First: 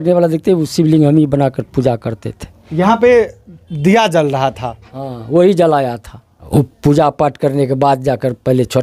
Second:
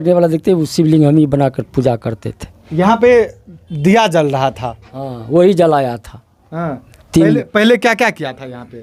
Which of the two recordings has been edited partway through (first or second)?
first